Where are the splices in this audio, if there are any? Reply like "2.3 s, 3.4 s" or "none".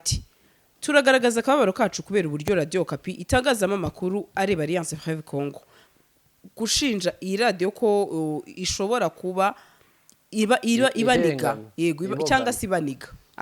5.8 s